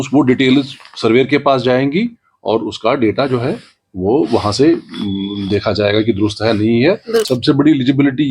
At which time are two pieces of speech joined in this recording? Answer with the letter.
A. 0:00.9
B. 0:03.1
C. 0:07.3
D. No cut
C